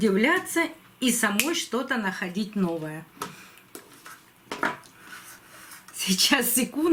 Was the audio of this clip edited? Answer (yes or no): no